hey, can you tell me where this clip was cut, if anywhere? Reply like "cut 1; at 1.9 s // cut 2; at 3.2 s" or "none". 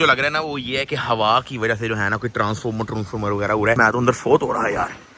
cut 1; at 3.8 s

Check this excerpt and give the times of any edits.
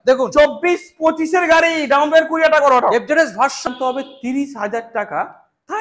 cut 1; at 3.6 s

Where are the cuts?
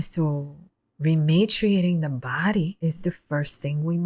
cut 1; at 2.8 s

